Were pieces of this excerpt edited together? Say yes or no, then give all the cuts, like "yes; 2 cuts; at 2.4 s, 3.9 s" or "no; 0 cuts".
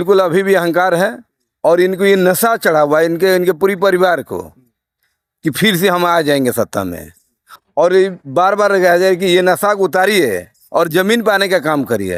no; 0 cuts